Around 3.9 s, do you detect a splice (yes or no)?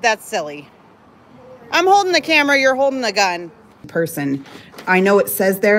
yes